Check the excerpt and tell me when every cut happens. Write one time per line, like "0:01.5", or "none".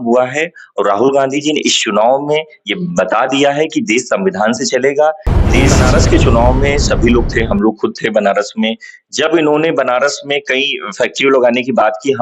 0:05.8